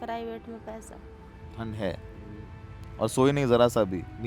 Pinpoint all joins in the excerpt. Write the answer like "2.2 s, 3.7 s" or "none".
1.4 s